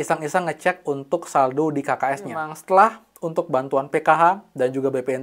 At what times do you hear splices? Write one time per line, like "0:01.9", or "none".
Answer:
0:02.5